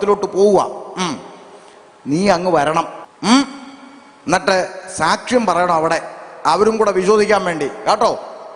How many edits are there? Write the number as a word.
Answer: one